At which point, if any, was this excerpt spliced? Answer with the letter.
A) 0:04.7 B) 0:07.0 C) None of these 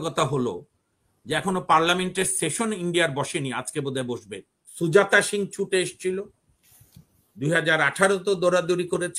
A